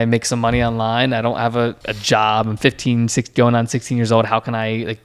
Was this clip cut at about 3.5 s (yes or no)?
no